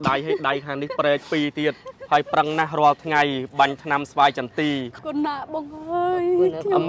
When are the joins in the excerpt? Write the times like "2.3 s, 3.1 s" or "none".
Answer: 5.0 s